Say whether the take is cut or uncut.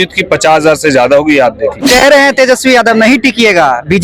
cut